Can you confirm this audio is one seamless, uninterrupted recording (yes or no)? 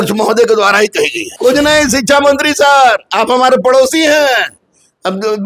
no